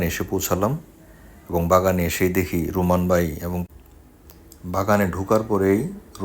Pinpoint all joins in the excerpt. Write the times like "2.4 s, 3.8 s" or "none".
3.6 s